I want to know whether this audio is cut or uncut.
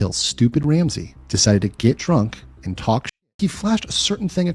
cut